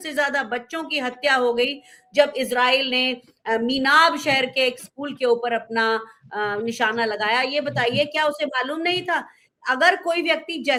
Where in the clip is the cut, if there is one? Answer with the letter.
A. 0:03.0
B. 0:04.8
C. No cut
C